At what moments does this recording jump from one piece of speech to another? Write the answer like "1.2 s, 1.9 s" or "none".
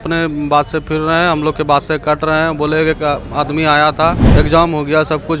4.2 s